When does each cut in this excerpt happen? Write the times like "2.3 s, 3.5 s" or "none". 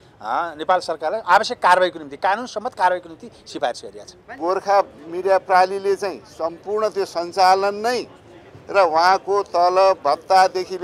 4.4 s